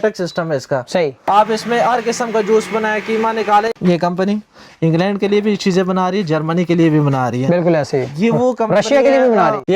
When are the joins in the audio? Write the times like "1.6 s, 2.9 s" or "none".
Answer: none